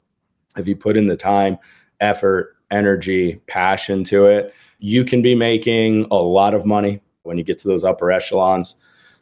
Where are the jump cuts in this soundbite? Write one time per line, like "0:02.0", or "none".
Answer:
0:07.3

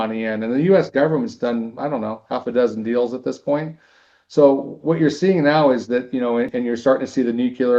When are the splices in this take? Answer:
0:06.5

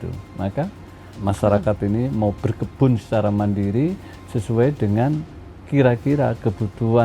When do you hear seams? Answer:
0:01.1

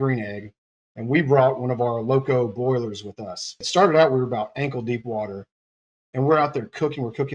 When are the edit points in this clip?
0:03.6

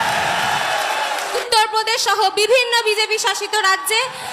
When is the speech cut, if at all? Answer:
0:01.4

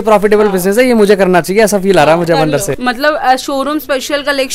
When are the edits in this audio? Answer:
0:02.7

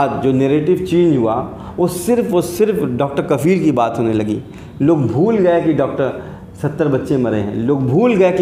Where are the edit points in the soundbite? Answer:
none

